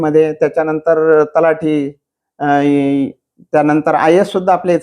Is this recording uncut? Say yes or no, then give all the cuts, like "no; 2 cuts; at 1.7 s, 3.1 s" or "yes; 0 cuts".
yes; 0 cuts